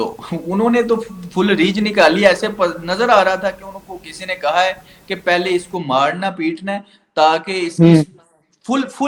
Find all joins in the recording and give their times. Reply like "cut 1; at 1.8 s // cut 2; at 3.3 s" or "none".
none